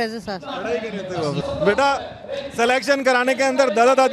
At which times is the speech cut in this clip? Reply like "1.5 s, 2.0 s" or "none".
1.4 s